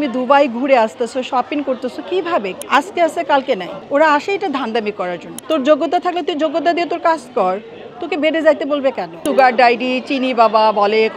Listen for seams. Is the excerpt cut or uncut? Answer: cut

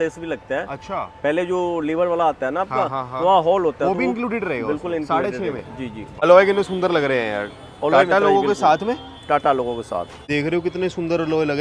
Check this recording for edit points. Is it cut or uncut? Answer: cut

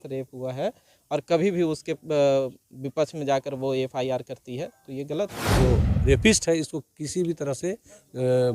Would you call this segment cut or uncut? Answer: cut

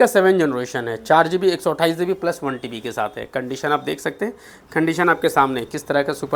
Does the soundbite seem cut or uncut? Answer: uncut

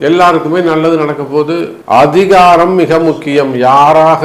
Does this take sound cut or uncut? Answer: cut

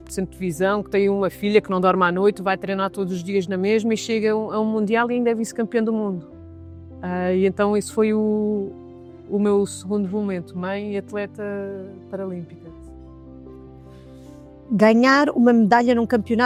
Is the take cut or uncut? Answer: uncut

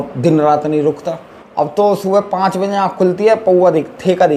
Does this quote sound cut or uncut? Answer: uncut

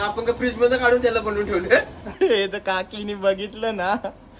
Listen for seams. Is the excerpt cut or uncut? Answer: cut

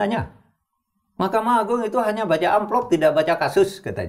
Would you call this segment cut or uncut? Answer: uncut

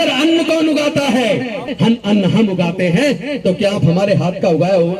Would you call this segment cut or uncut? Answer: cut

